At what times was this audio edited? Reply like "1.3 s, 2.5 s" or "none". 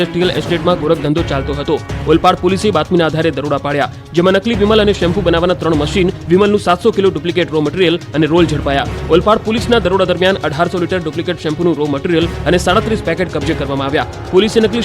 8.4 s